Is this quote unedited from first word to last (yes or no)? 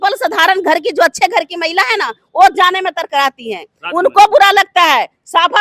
yes